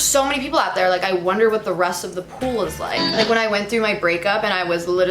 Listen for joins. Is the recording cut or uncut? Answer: cut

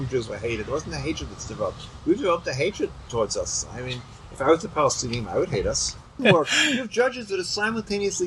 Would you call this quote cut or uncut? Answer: cut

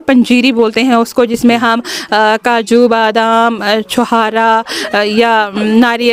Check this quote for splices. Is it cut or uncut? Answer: uncut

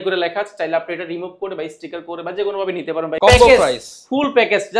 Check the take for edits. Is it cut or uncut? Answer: cut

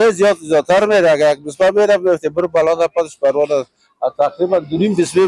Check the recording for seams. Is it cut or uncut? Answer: uncut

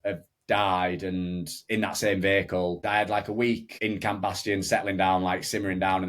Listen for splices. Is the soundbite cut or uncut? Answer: cut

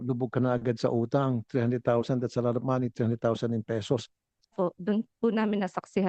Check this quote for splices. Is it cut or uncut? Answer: cut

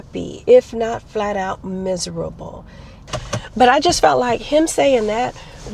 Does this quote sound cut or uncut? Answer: cut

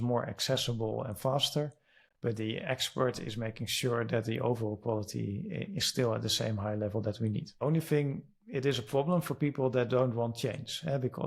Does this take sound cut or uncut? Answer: cut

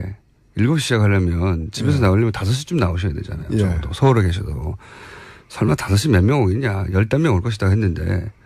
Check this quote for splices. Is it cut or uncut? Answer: cut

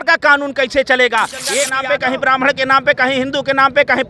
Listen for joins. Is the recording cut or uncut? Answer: cut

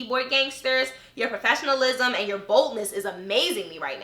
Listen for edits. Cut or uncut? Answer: uncut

